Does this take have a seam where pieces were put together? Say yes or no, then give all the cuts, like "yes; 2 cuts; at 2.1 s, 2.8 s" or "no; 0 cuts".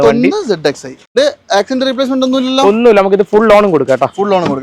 yes; 1 cut; at 1.0 s